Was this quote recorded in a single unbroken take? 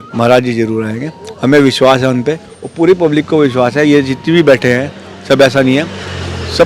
yes; 0 cuts

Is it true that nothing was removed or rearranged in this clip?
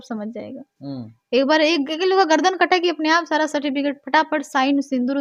yes; 0 cuts

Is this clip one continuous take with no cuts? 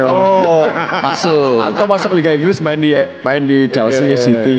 yes; 0 cuts

